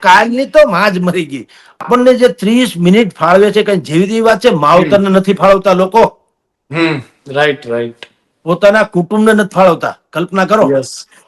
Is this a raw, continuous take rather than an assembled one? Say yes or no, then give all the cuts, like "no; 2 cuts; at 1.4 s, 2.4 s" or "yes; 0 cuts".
no; 1 cut; at 1.8 s